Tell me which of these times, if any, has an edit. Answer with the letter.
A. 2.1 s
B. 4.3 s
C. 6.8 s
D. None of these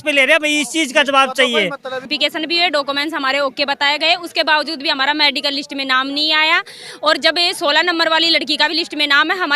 A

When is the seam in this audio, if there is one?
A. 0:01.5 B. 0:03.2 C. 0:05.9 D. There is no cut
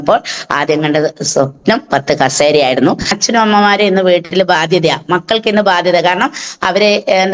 B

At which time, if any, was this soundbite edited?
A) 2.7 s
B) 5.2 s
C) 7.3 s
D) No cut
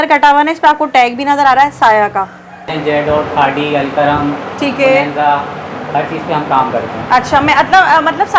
A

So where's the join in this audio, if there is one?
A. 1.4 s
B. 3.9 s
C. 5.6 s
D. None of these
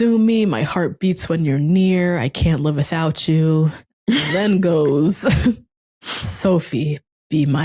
B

